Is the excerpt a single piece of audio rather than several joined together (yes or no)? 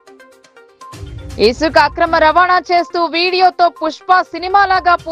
no